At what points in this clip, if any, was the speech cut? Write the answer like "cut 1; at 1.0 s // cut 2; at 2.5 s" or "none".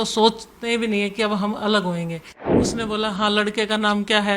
cut 1; at 2.6 s